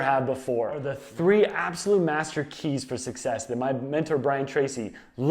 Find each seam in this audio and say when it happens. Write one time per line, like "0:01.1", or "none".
0:01.0

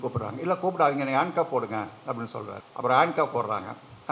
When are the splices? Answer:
0:02.6

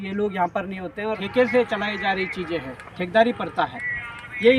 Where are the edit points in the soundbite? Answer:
0:01.2

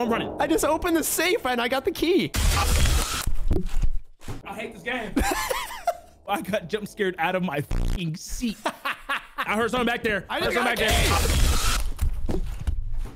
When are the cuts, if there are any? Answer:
0:02.4
0:04.3
0:09.4

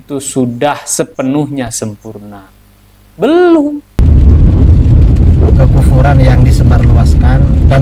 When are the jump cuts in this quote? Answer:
0:04.0

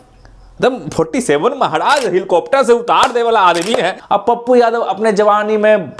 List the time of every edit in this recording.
0:04.0

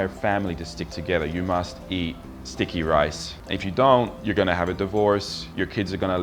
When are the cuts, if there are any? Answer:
none

